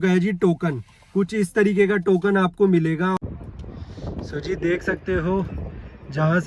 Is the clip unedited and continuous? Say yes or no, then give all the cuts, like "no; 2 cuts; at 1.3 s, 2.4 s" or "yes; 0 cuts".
no; 1 cut; at 3.2 s